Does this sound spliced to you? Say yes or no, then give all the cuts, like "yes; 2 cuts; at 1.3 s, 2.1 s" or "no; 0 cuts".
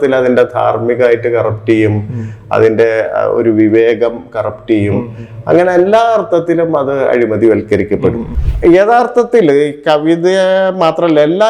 yes; 1 cut; at 8.3 s